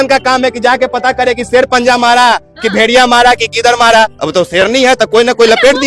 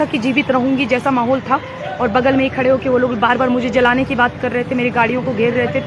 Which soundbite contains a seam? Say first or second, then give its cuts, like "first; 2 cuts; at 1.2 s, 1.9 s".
first; 1 cut; at 4.2 s